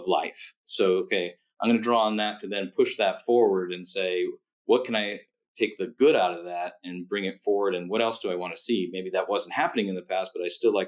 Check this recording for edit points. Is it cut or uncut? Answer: uncut